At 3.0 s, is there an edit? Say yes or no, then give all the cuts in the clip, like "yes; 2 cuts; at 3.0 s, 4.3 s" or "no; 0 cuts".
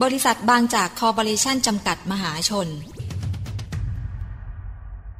yes; 1 cut; at 3.0 s